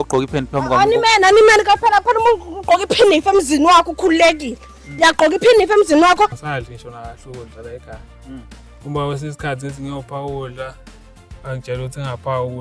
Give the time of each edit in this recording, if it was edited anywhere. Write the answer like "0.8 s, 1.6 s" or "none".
6.4 s